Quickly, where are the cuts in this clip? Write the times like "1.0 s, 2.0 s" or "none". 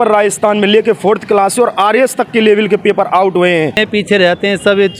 3.8 s